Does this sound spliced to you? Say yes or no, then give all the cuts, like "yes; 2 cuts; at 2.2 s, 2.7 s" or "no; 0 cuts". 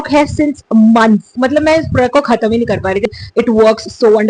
yes; 2 cuts; at 1.3 s, 3.0 s